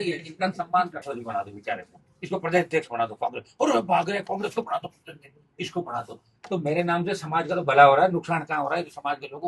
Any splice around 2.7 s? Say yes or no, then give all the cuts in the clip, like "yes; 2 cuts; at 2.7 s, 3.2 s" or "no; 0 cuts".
no; 1 cut; at 1.0 s